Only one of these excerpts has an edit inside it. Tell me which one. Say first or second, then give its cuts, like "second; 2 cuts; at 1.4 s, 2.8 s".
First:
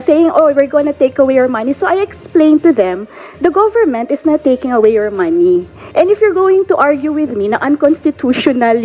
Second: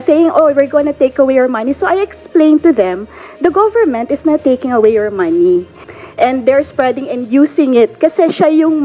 second; 1 cut; at 5.8 s